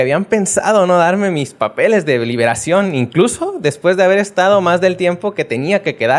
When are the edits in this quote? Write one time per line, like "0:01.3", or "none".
none